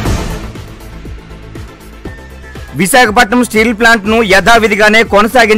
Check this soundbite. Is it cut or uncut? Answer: cut